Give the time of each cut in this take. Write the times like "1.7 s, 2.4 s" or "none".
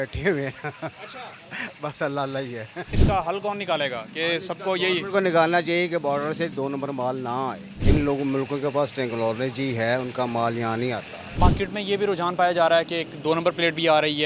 3.1 s, 7.7 s, 11.4 s